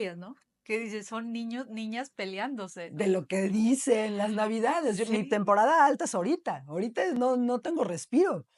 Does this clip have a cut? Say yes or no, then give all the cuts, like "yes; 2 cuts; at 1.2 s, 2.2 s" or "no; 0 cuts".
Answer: no; 0 cuts